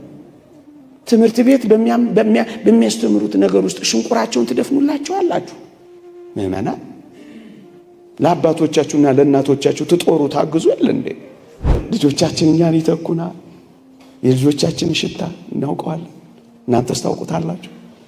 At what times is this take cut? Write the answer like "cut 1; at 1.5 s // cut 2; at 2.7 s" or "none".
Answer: cut 1; at 11.8 s